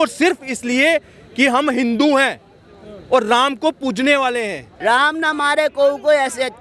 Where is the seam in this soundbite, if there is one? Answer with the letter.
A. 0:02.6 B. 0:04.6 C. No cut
B